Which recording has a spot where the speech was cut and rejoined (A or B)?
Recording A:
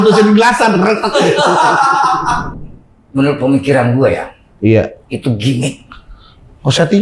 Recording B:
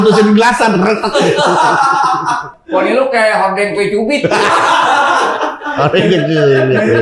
A